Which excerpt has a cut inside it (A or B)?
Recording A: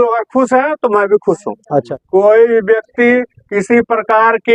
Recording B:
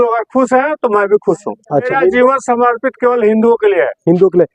A